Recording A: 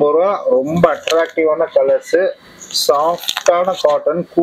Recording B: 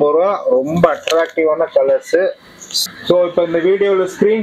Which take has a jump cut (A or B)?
B